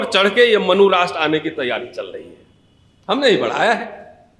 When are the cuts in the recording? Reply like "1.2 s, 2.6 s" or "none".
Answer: none